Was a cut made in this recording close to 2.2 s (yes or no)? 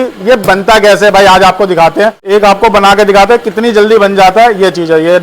yes